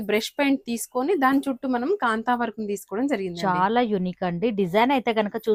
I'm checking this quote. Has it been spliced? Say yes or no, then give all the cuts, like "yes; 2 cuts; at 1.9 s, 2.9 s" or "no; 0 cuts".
no; 0 cuts